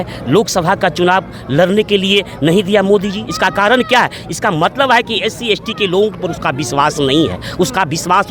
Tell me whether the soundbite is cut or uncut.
uncut